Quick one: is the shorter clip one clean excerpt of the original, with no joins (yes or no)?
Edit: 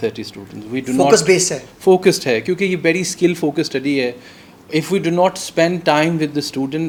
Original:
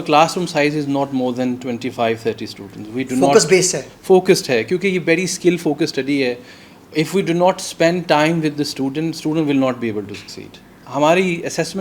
yes